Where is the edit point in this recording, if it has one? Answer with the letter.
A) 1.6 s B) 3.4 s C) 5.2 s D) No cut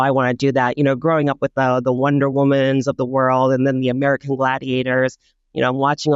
D